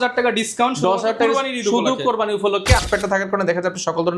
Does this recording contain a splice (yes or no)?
yes